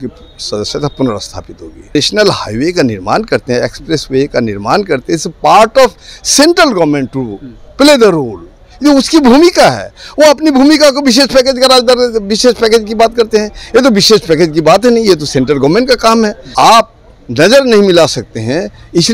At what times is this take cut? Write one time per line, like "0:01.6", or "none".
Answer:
0:01.9
0:16.4